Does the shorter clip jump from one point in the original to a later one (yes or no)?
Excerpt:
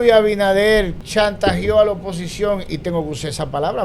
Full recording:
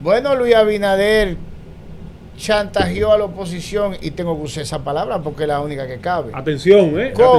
yes